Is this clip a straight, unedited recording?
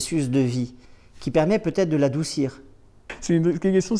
no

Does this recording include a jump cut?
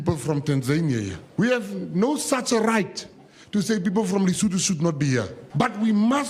yes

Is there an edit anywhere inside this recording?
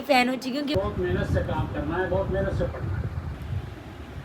yes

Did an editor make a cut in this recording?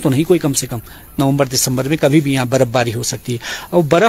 yes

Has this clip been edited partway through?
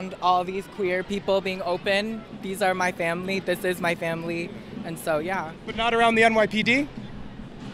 no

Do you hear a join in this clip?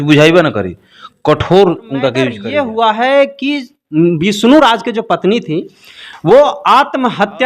yes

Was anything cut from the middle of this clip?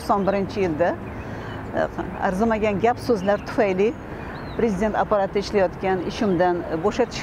no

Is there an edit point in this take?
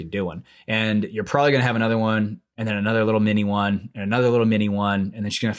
no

